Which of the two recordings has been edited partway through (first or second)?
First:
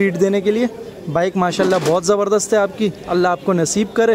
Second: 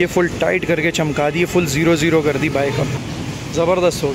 second